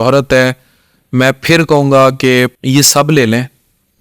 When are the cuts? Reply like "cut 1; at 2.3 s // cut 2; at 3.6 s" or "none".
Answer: cut 1; at 2.6 s